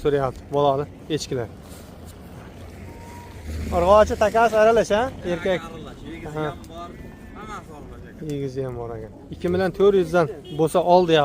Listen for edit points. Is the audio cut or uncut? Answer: cut